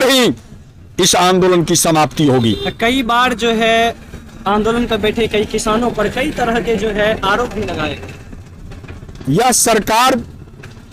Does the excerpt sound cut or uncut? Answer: uncut